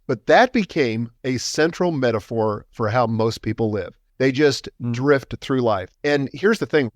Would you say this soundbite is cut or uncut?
cut